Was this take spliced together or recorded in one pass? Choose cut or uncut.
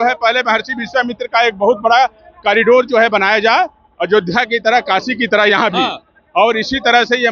uncut